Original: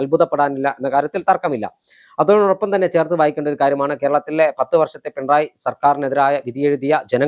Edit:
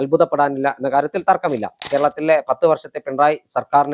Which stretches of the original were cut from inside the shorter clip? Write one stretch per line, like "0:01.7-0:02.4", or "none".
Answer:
0:01.8-0:03.9